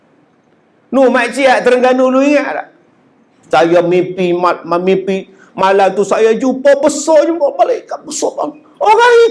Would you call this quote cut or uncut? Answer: uncut